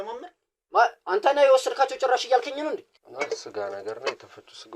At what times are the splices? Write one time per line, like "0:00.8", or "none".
0:03.0